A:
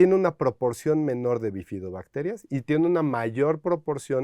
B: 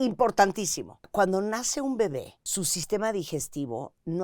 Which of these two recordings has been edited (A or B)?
B